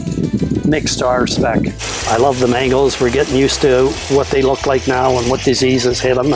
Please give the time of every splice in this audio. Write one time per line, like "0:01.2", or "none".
0:01.8